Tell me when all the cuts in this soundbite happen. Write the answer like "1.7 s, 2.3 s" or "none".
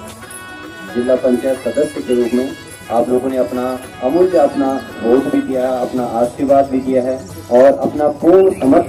none